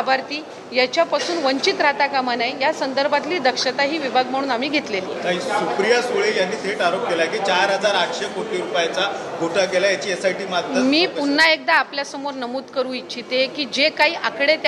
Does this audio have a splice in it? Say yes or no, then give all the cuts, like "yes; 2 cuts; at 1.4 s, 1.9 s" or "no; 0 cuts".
no; 0 cuts